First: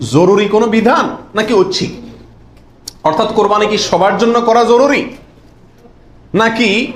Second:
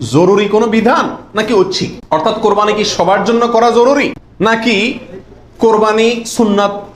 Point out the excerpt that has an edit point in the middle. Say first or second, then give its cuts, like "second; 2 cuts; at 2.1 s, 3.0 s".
second; 2 cuts; at 1.9 s, 4.5 s